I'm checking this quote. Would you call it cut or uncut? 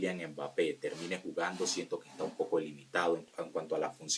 cut